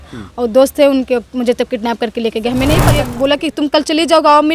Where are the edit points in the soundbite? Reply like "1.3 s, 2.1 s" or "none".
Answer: 2.9 s